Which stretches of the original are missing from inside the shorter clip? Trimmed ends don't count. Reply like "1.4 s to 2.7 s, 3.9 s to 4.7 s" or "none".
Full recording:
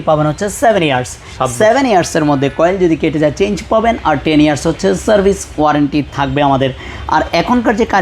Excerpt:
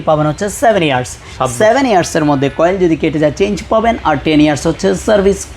none